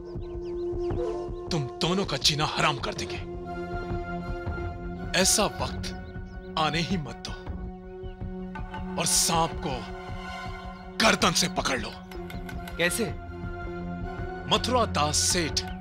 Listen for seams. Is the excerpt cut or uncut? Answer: uncut